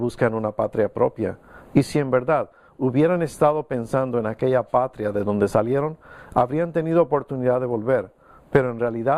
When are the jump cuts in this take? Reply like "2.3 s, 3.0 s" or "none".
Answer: 3.7 s